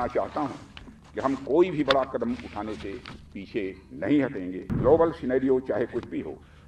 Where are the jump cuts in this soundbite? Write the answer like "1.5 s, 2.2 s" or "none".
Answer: 4.6 s